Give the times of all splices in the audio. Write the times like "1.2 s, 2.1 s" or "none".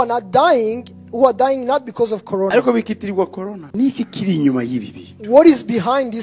3.6 s